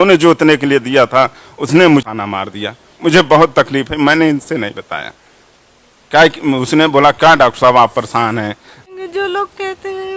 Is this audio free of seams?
no; 2 cuts; at 2.1 s, 8.9 s

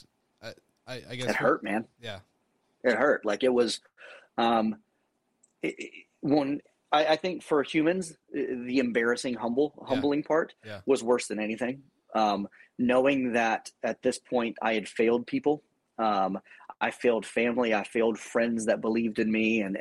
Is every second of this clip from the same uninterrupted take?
yes; 0 cuts

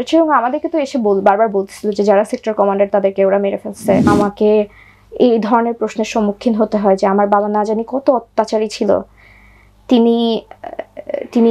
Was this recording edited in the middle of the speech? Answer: yes; 1 cut; at 4.1 s

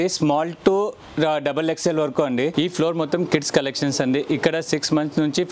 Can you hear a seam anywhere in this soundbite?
yes; 1 cut; at 2.5 s

